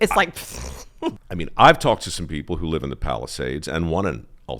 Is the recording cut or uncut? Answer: cut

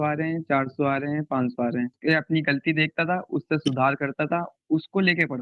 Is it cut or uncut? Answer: cut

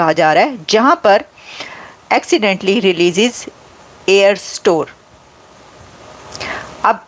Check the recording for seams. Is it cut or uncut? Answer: uncut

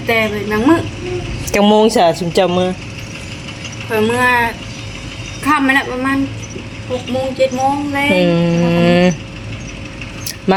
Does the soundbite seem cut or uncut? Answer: uncut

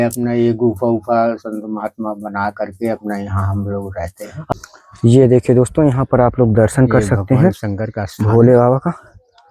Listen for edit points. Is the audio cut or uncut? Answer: cut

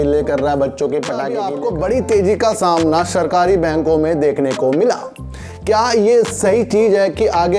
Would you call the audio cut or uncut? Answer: cut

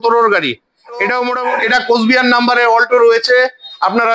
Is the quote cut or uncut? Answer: cut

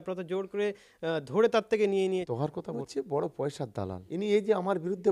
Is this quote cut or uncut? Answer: cut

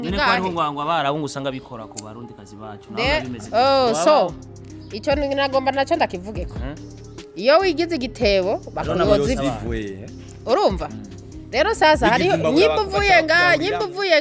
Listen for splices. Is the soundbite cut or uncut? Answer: uncut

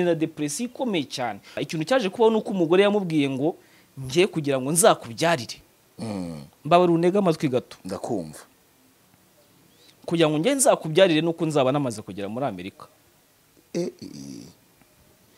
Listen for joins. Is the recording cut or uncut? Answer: cut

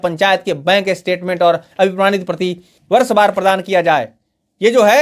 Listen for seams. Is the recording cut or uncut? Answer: cut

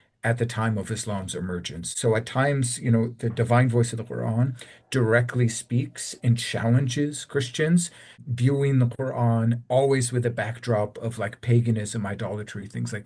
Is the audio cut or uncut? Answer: cut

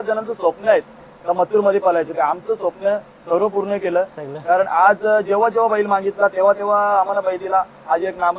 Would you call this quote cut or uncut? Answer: uncut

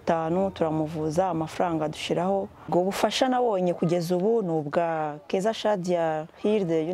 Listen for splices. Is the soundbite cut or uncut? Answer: cut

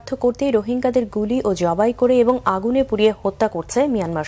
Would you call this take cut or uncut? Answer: cut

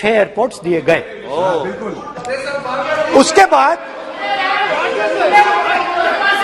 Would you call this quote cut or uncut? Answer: uncut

